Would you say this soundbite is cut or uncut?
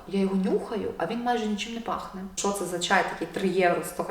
cut